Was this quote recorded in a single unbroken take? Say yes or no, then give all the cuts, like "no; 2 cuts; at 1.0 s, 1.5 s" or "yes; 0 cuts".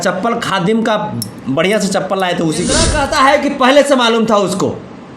no; 1 cut; at 2.9 s